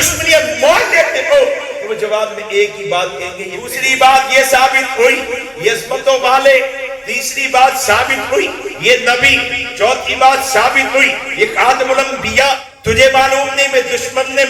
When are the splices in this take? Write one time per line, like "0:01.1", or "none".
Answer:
0:03.7
0:12.7

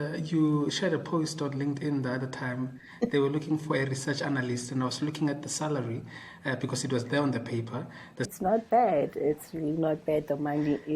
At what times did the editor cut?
0:08.3

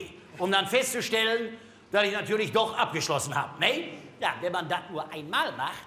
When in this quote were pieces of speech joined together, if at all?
0:04.3

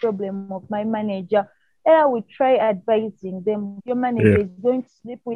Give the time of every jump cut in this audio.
0:03.7

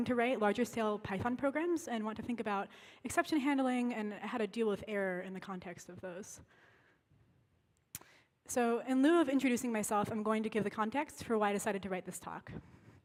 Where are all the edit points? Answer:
none

